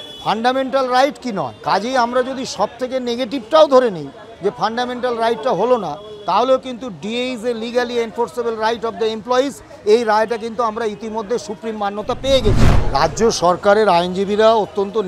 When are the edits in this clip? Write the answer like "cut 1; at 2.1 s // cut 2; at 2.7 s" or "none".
cut 1; at 1.5 s // cut 2; at 12.7 s